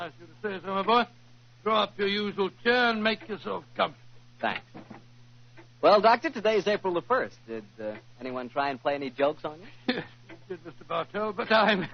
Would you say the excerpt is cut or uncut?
uncut